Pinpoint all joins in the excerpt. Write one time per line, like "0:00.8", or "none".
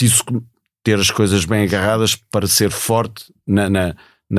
none